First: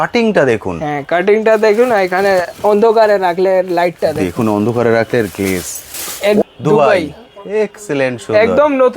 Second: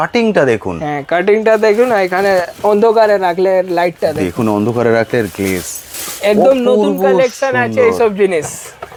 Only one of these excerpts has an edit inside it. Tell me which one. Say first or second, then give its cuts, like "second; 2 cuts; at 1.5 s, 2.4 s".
first; 1 cut; at 6.4 s